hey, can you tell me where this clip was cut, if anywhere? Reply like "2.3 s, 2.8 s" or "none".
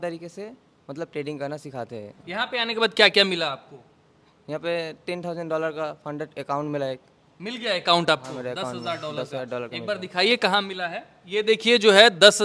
none